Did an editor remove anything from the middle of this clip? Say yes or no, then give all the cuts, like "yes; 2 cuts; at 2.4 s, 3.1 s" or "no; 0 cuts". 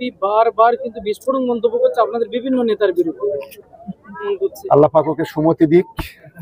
yes; 1 cut; at 4.3 s